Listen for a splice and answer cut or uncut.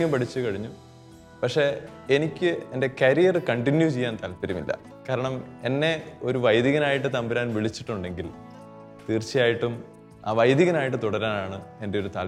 uncut